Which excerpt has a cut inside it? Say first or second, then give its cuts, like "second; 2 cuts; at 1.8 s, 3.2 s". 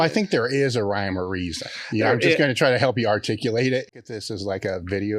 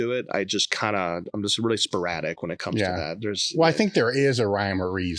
first; 1 cut; at 4.1 s